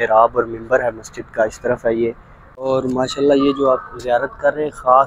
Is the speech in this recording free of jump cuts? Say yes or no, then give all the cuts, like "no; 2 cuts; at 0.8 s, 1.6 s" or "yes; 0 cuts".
no; 1 cut; at 2.6 s